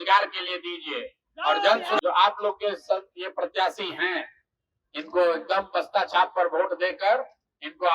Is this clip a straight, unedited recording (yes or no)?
no